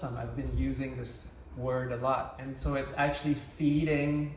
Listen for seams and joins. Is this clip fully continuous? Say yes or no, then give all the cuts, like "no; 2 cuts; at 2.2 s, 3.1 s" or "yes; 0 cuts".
no; 1 cut; at 2.4 s